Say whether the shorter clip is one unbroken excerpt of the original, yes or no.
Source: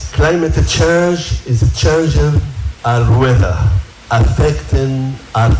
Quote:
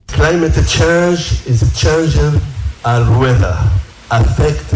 yes